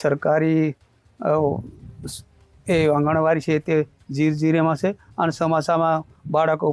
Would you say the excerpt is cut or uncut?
uncut